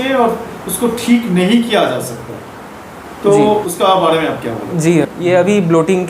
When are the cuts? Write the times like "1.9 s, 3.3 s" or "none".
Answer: 3.7 s, 5.1 s